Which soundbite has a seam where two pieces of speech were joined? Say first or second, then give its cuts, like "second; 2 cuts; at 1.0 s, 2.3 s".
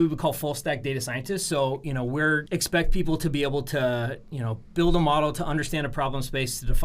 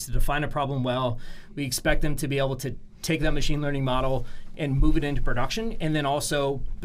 first; 1 cut; at 2.4 s